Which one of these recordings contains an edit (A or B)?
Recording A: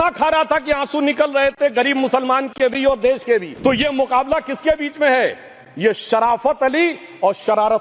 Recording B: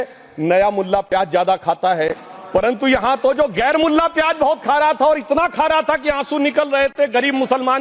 A